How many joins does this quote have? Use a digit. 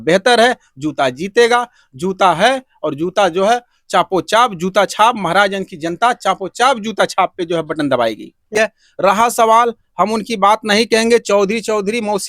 1